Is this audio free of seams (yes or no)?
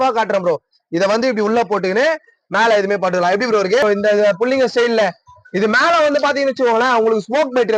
no